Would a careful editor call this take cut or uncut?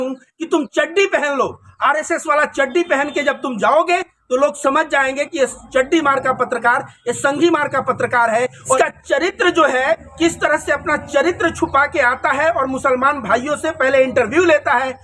cut